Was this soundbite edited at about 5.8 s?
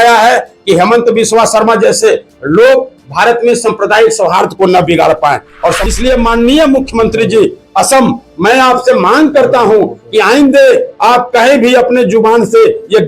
yes; 1 cut; at 5.8 s

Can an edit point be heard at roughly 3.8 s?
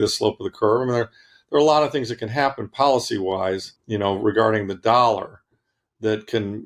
yes; 1 cut; at 3.8 s

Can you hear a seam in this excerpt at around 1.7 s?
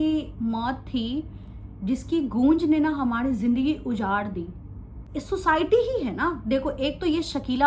no; 1 cut; at 5.1 s

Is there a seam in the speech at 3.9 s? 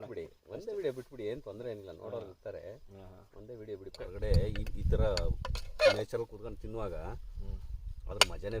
yes; 1 cut; at 3.9 s

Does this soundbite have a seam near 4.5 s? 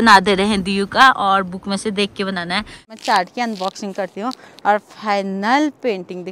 no; 1 cut; at 2.9 s

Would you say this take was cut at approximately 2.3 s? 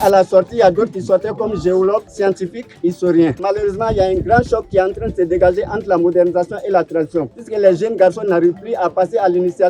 yes; 3 cuts; at 2.3 s, 3.4 s, 7.4 s

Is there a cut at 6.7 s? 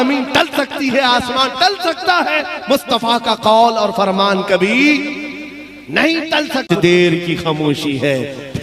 yes; 1 cut; at 6.7 s

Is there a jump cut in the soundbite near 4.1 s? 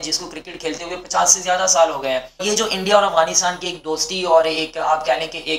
no; 1 cut; at 2.4 s

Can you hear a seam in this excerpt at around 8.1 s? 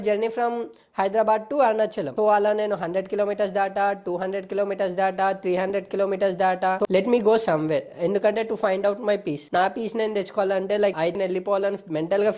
no; 2 cuts; at 6.8 s, 11.1 s

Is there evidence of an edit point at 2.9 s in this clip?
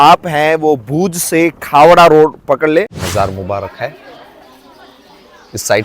yes; 1 cut; at 2.9 s

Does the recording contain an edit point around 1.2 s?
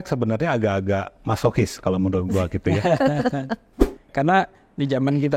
no; 1 cut; at 4.0 s

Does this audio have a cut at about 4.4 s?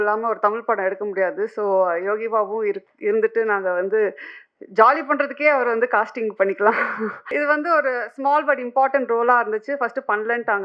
no; 1 cut; at 7.2 s

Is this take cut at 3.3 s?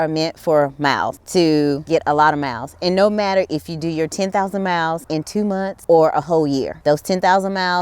no; 4 cuts; at 1.2 s, 1.8 s, 5.4 s, 6.7 s

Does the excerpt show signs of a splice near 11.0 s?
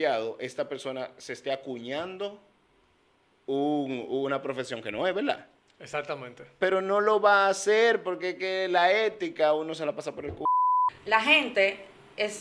yes; 1 cut; at 11.0 s

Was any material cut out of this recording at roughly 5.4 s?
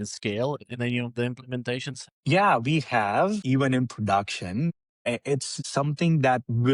yes; 3 cuts; at 2.0 s, 3.4 s, 5.4 s

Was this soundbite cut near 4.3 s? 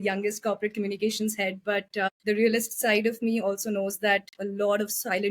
no; 1 cut; at 2.1 s

